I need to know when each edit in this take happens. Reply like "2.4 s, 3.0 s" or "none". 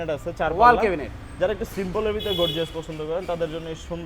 none